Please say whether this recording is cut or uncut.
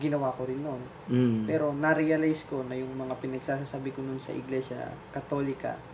uncut